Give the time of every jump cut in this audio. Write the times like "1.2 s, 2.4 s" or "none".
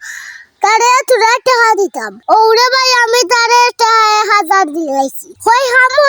2.1 s